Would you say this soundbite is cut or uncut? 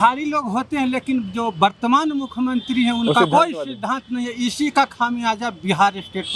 uncut